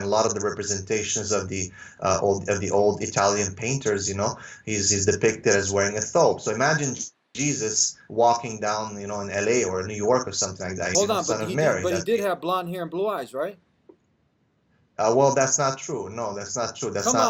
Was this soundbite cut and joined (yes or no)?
yes